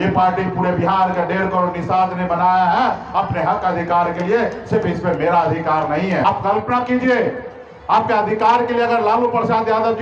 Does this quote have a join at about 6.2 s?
yes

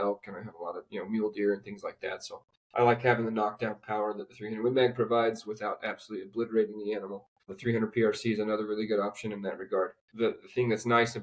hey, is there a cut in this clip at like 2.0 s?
no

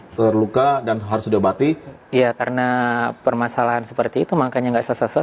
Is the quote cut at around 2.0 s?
yes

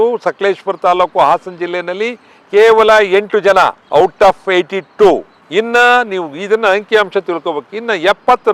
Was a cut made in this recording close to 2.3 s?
no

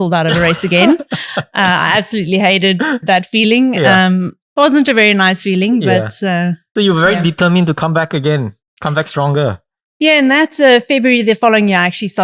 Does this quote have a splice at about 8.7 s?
no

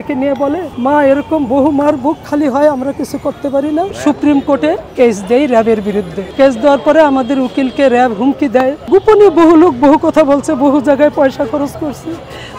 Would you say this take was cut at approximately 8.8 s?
yes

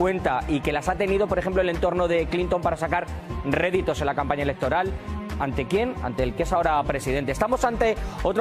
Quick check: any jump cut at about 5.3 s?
no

